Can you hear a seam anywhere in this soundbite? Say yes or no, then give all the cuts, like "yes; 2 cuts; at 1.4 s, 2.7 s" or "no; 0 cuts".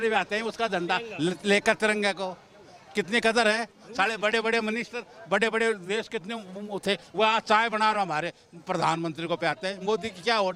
no; 0 cuts